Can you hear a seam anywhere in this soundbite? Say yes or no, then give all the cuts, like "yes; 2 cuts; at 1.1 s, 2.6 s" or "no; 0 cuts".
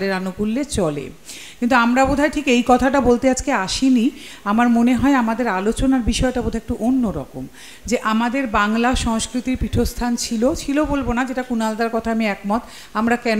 no; 0 cuts